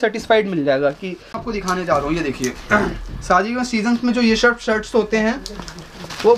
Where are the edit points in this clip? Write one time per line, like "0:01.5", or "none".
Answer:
0:01.4